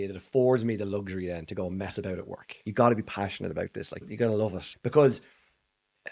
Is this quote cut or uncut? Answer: cut